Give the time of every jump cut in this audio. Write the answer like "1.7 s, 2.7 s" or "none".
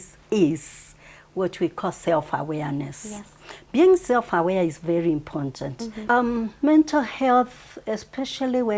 5.9 s